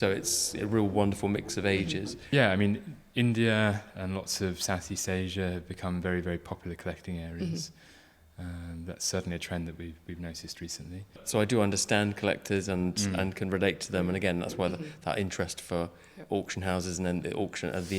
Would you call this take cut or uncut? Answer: cut